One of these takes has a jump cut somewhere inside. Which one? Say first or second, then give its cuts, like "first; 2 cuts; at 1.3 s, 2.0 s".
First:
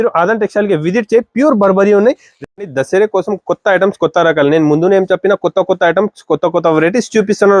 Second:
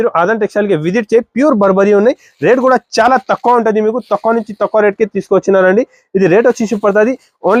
first; 1 cut; at 2.3 s